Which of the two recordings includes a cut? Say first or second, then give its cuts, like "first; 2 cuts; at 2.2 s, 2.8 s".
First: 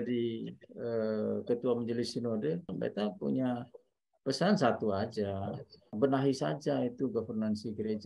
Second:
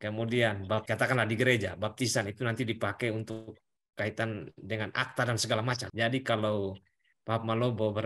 second; 1 cut; at 5.9 s